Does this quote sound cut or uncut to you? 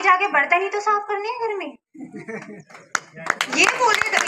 uncut